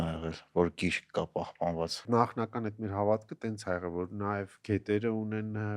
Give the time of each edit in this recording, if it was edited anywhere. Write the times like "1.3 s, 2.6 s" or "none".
2.0 s